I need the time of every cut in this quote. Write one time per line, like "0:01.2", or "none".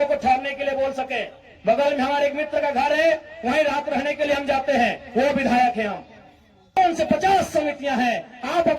0:06.8